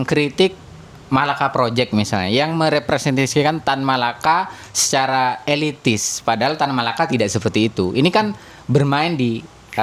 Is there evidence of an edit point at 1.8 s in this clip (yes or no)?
no